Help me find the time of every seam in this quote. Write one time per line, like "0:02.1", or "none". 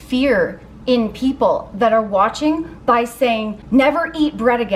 0:03.6